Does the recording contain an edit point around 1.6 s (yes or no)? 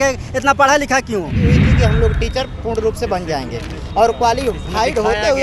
yes